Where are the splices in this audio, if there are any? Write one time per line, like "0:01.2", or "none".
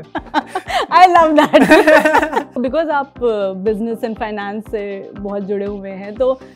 none